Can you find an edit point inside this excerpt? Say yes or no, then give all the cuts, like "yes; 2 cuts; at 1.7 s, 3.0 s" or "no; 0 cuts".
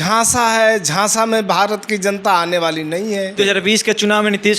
yes; 1 cut; at 3.3 s